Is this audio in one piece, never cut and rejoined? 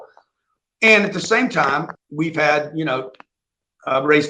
no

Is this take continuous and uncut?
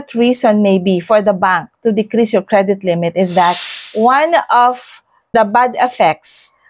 no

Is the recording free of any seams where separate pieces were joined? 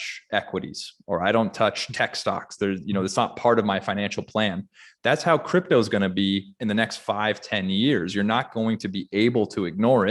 yes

